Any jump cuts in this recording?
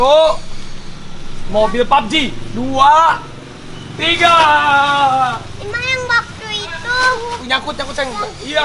no; 0 cuts

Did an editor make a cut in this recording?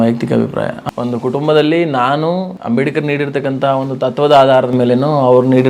yes; 2 cuts; at 0.8 s, 2.5 s

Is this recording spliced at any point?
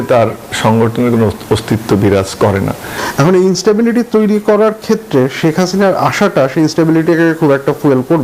yes; 1 cut; at 2.9 s

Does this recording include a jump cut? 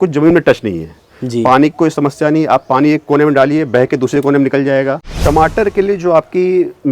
yes; 1 cut; at 5.1 s

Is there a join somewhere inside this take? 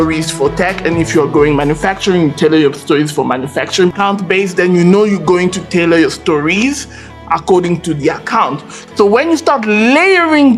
yes; 2 cuts; at 3.9 s, 8.7 s

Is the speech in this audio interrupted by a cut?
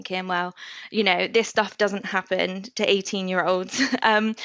no; 0 cuts

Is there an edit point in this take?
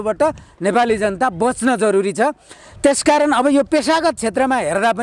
no; 0 cuts

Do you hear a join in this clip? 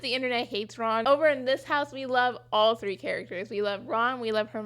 yes; 1 cut; at 1.0 s

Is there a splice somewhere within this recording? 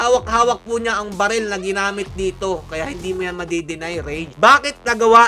yes; 2 cuts; at 2.7 s, 4.3 s

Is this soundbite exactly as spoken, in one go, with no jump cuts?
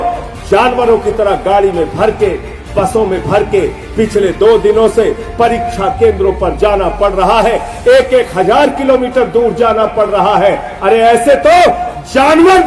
yes; 0 cuts

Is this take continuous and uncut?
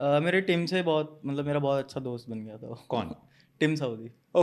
yes; 0 cuts

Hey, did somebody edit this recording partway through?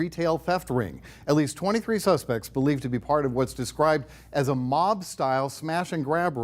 no; 0 cuts

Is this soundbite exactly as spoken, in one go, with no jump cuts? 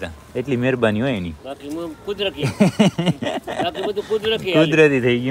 yes; 0 cuts

